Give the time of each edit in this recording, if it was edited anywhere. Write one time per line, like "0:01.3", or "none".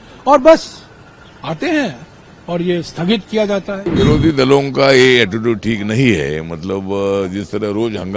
0:03.8